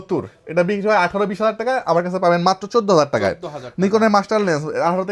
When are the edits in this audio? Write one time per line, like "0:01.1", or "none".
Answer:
none